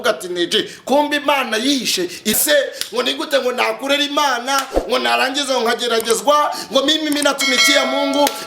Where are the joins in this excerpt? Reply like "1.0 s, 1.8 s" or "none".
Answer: 2.4 s